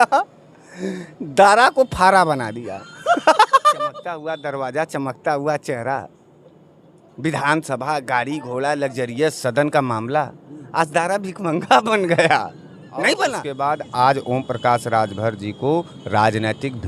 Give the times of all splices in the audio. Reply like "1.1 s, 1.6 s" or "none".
4.2 s, 13.5 s